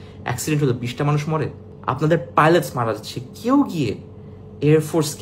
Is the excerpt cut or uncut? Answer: cut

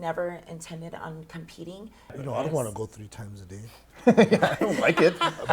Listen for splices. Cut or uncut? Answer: cut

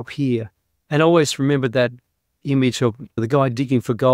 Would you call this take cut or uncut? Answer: cut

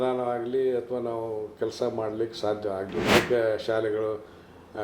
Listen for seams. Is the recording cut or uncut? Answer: cut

